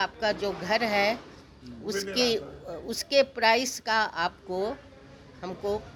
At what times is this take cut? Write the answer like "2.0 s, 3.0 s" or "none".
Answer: none